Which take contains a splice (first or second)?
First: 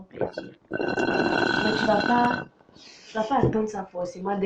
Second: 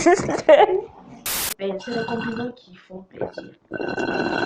second